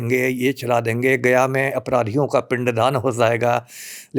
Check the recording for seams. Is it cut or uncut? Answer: uncut